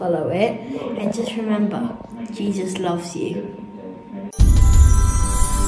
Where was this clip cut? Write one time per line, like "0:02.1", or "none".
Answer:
0:04.3